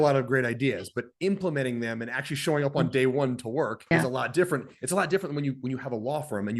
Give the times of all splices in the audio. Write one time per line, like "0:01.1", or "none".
0:03.9